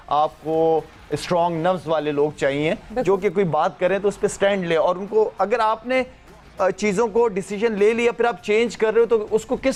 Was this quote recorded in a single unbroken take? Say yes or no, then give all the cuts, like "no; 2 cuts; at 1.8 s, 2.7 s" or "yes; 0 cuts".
yes; 0 cuts